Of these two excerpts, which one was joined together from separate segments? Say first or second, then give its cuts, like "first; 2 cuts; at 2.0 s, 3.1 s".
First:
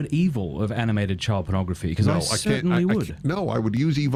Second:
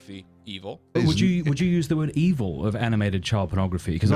second; 1 cut; at 1.0 s